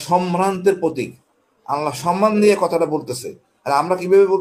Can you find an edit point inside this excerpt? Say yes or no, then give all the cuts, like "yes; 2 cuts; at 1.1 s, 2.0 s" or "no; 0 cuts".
no; 0 cuts